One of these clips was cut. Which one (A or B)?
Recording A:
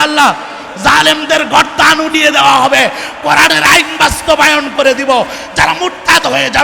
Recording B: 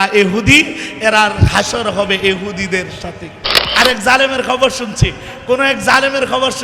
B